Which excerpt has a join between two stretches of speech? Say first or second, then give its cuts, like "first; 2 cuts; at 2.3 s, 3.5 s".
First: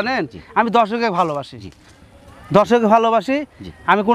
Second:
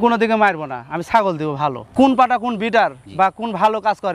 second; 1 cut; at 1.8 s